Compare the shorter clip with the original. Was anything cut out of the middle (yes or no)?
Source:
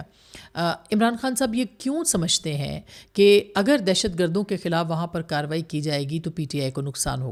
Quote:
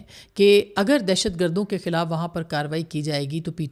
no